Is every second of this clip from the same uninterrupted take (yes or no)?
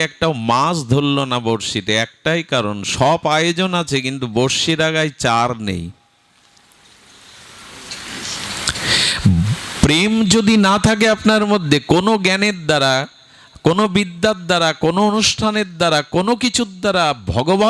yes